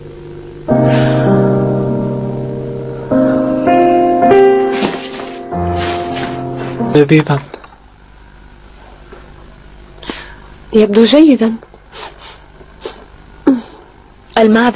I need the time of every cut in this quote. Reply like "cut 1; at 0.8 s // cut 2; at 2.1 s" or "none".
cut 1; at 10.8 s